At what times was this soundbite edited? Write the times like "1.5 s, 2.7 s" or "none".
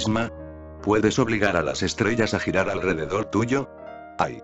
none